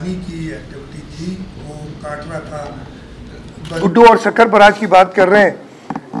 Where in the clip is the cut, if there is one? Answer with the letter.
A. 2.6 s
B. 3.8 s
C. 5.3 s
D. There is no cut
B